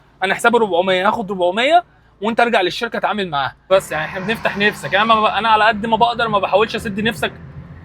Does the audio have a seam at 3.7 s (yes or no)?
yes